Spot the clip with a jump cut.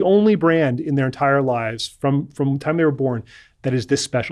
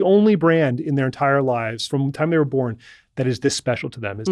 second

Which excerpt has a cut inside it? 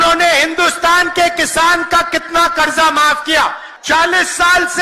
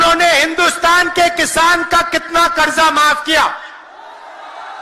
first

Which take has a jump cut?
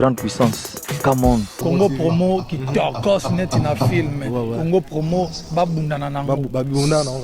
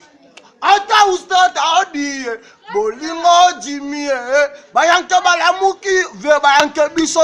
first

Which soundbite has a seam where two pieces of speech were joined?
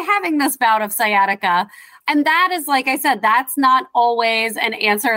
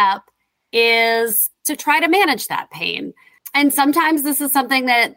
first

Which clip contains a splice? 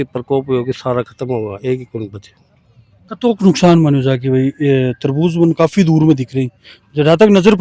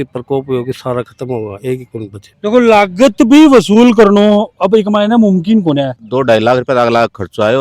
second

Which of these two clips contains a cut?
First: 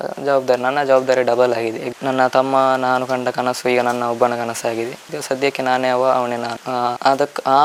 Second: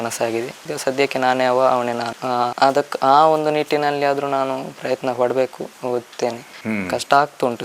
second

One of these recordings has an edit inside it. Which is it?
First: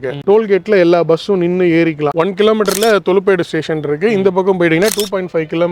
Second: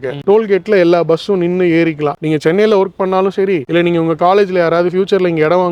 first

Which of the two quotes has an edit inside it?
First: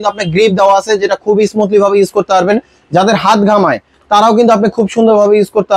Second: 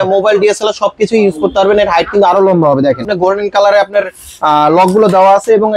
second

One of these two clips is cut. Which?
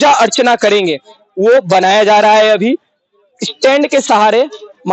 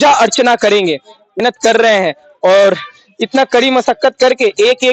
second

